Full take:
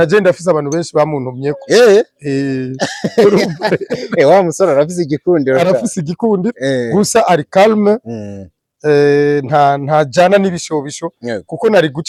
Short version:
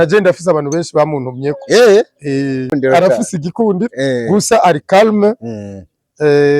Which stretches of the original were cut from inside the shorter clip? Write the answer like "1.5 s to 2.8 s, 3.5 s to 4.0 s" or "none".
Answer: 2.8 s to 5.4 s